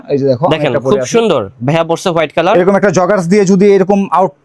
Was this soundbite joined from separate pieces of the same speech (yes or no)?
no